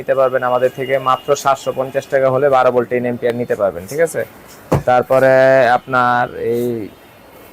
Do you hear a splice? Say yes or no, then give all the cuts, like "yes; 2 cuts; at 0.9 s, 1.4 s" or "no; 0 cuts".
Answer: no; 0 cuts